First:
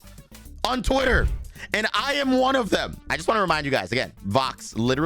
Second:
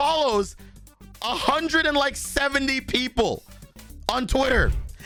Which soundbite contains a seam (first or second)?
first